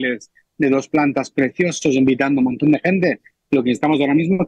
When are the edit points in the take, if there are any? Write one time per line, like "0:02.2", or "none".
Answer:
none

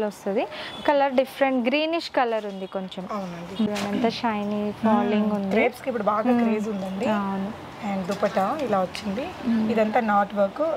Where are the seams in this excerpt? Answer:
0:03.7

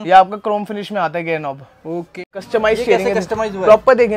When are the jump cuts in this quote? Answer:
0:02.3

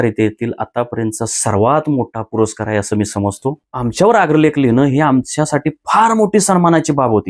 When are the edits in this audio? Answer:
0:03.7

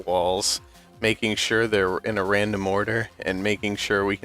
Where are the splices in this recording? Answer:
0:01.3

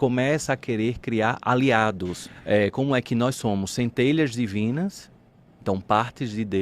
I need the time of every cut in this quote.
0:02.3

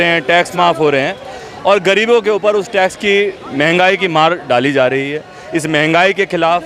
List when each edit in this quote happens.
none

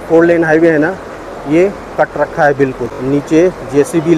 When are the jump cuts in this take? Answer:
0:02.9

